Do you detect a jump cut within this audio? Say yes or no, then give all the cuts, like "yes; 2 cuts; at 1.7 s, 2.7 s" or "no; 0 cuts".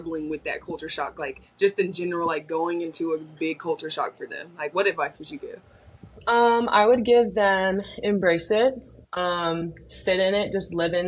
no; 0 cuts